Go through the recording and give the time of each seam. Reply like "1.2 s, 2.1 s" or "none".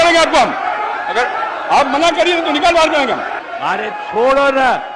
3.4 s